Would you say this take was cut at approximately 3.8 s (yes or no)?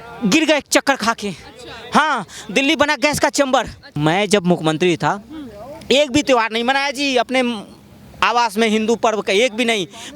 yes